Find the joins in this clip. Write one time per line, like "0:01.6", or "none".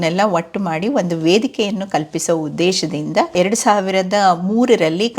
0:03.3